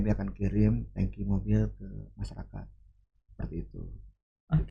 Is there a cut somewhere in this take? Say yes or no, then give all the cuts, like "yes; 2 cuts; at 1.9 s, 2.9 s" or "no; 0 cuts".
no; 0 cuts